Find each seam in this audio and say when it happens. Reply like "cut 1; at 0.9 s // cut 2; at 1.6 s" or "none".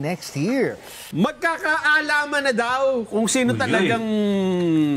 cut 1; at 0.9 s